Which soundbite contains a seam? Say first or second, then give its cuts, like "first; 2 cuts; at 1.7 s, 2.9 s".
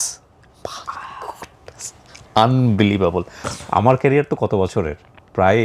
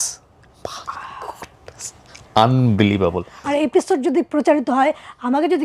second; 1 cut; at 3.3 s